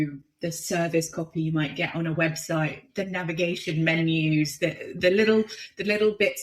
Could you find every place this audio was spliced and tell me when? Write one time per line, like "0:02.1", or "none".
0:02.8

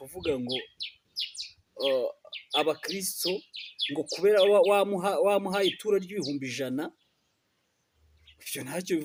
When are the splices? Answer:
none

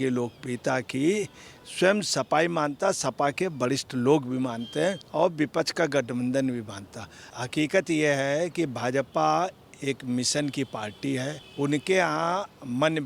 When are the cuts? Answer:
0:05.0
0:07.2
0:11.4

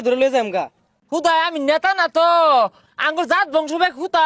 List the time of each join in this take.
0:01.0

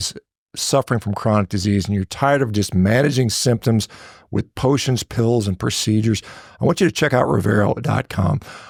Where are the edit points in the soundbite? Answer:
none

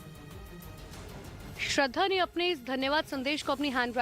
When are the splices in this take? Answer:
0:01.2

